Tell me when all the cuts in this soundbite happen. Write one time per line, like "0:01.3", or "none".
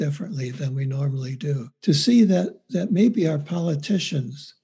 0:01.7

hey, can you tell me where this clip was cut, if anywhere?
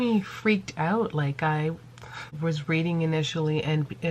0:02.3

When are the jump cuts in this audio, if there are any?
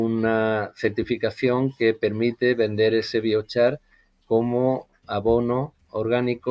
none

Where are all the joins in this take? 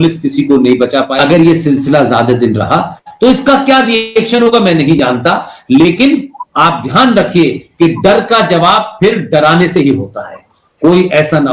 0:01.1

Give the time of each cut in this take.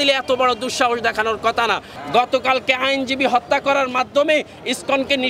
0:01.9

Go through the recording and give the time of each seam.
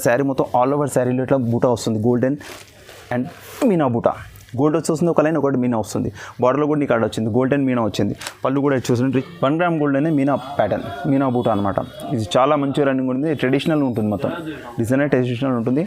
0:09.1

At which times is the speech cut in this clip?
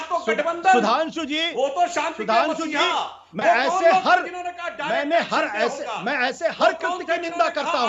none

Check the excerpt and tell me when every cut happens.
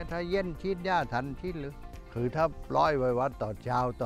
none

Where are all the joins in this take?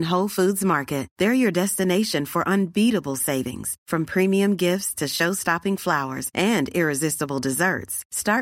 none

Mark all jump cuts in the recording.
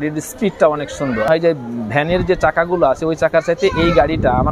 0:01.3

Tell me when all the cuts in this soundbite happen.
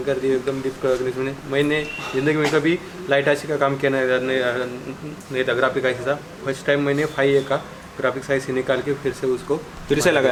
none

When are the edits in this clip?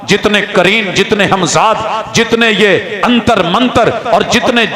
none

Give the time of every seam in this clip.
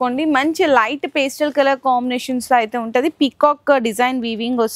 none

